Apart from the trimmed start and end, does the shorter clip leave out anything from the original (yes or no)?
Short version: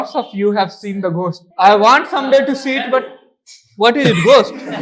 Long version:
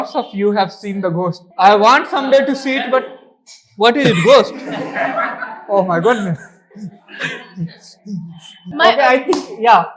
no